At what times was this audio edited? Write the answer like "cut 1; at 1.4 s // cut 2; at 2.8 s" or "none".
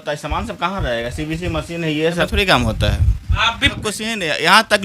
cut 1; at 2.3 s // cut 2; at 3.6 s

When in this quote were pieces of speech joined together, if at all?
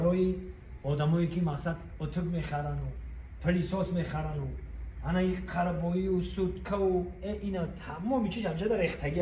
none

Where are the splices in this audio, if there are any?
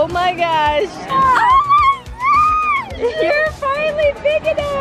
cut 1; at 1.0 s

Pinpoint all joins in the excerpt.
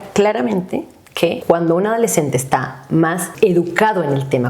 cut 1; at 1.4 s // cut 2; at 3.3 s

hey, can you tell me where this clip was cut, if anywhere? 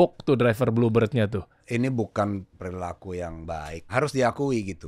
cut 1; at 1.6 s // cut 2; at 2.6 s // cut 3; at 3.9 s

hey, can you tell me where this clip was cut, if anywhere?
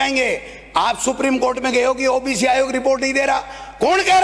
none

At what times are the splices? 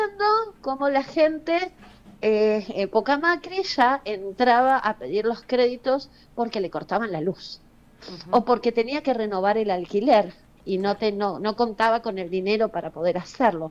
none

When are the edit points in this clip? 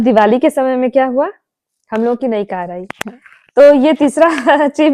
none

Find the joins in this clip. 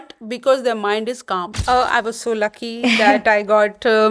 cut 1; at 1.5 s

